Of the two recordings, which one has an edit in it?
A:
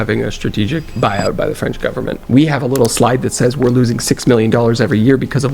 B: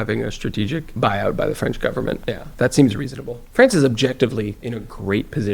A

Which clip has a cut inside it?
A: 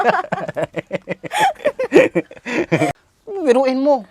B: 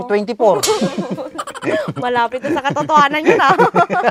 A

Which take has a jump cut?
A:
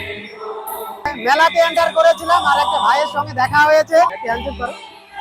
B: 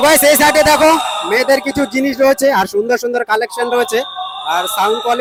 A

